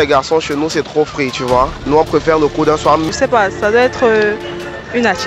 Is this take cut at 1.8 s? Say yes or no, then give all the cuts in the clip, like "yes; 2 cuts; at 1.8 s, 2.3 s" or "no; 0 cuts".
yes; 2 cuts; at 1.8 s, 3.0 s